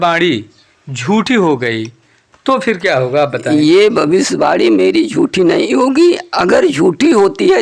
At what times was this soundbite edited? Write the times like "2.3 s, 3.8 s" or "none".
none